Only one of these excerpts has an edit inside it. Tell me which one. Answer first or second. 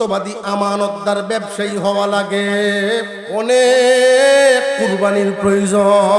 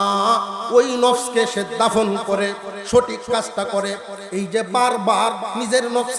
first